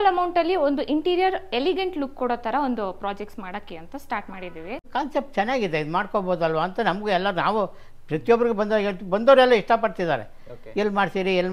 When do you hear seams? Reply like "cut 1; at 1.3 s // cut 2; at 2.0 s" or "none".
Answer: cut 1; at 4.9 s